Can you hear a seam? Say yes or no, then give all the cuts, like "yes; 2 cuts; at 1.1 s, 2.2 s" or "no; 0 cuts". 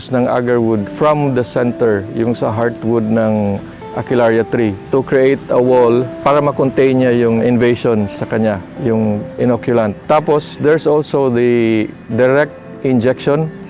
no; 0 cuts